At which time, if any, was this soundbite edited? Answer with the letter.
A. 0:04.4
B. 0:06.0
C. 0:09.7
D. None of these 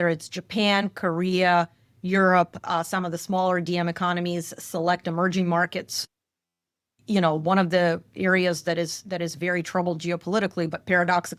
D